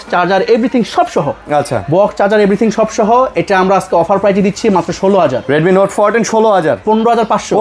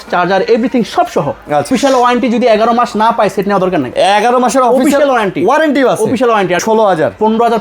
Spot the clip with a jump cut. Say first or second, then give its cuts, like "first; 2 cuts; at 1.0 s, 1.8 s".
second; 2 cuts; at 1.7 s, 6.6 s